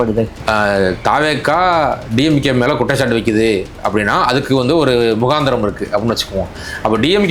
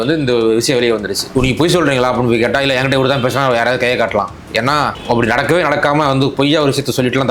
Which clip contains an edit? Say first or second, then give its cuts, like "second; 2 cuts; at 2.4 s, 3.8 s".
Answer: second; 1 cut; at 1.3 s